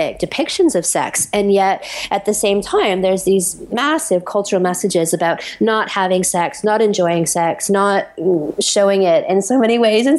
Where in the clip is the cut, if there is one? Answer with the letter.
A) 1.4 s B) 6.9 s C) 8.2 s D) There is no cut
D